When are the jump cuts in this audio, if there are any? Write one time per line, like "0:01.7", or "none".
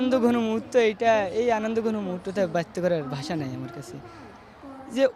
none